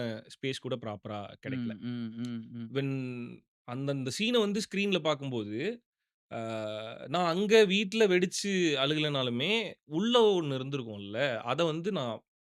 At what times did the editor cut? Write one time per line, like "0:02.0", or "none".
none